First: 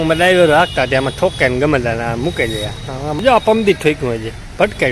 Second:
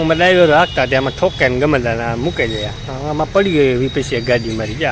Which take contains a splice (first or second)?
first